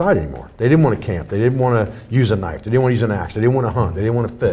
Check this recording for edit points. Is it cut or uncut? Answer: uncut